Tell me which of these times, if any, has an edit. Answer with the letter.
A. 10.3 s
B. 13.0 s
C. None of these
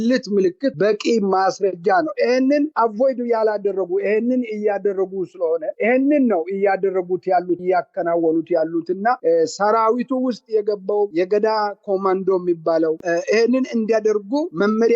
B